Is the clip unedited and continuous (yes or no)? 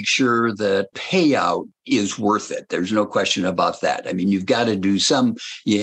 no